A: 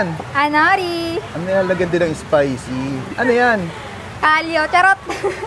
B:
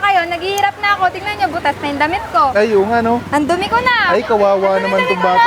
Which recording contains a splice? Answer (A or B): A